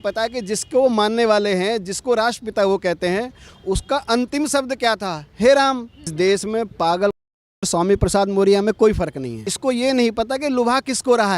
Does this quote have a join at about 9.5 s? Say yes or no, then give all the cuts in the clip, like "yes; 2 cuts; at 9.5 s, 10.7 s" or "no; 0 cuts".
yes; 2 cuts; at 6.1 s, 9.5 s